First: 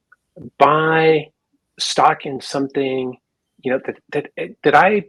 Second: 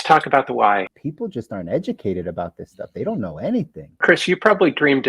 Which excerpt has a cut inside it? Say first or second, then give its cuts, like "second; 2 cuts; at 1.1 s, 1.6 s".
second; 2 cuts; at 0.9 s, 4.0 s